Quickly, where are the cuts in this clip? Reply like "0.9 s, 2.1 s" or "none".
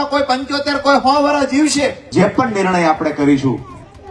2.0 s